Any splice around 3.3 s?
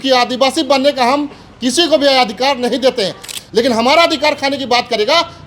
yes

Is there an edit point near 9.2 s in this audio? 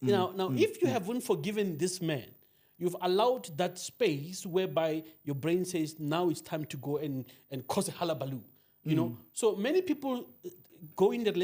no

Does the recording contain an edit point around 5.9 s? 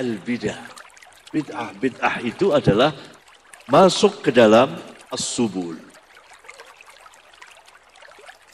yes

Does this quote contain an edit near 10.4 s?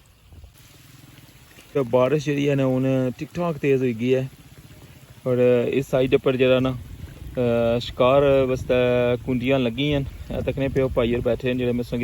no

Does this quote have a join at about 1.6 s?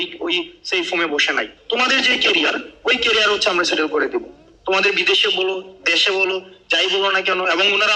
yes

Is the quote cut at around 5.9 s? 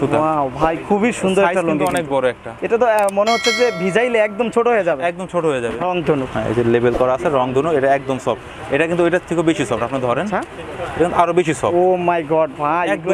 yes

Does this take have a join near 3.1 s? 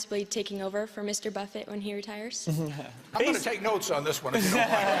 yes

